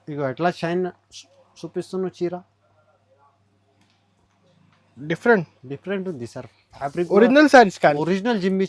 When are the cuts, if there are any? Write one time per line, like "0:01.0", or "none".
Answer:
none